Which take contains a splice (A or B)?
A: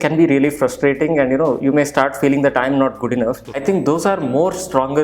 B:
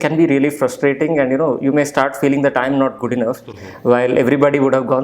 A